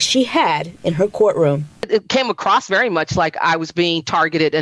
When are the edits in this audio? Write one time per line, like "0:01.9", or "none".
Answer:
none